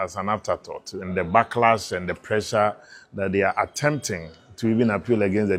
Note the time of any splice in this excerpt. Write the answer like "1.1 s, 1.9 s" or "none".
none